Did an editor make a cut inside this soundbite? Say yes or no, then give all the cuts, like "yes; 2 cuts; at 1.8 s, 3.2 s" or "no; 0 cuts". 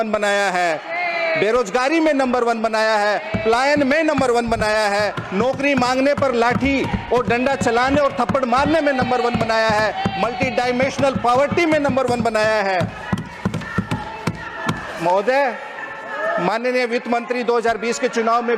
no; 0 cuts